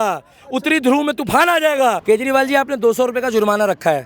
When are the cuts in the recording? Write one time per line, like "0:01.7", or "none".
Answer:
0:02.0